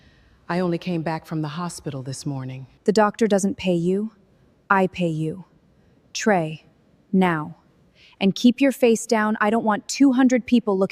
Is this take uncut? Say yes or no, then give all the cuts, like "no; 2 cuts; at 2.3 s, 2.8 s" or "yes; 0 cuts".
no; 1 cut; at 2.6 s